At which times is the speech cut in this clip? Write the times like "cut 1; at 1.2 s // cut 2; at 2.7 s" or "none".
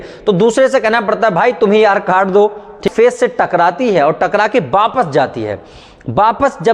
cut 1; at 2.9 s